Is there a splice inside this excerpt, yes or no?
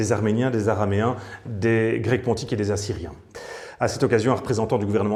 no